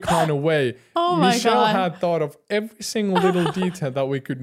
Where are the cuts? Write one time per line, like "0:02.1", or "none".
none